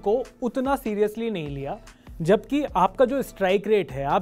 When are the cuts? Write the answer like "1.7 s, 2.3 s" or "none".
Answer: none